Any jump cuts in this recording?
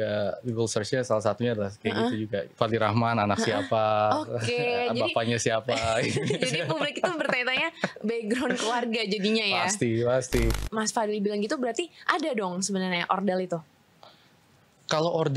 yes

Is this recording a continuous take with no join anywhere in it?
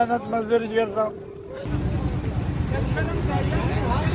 yes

